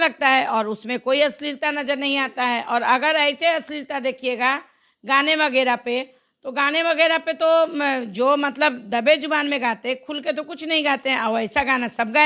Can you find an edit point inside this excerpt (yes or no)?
no